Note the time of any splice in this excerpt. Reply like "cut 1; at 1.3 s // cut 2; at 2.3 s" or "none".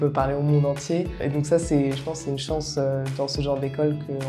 cut 1; at 1.2 s